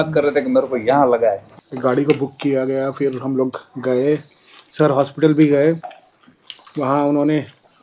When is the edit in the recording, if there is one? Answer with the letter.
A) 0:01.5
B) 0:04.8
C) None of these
A